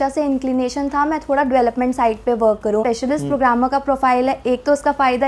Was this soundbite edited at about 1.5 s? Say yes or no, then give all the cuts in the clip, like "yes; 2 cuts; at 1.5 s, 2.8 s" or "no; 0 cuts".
no; 1 cut; at 2.8 s